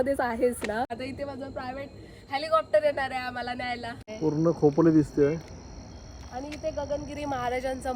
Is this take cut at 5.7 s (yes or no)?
no